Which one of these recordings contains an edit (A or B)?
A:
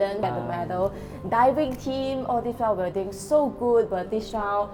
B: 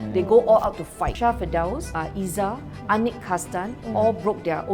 B